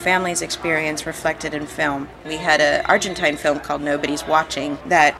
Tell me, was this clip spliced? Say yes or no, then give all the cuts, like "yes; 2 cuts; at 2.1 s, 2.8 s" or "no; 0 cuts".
yes; 1 cut; at 2.2 s